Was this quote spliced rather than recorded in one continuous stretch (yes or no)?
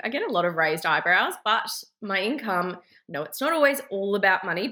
no